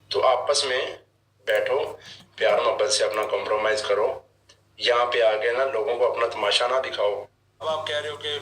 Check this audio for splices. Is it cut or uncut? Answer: cut